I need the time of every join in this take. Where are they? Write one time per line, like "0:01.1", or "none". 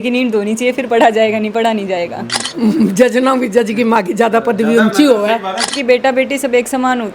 0:02.4
0:05.7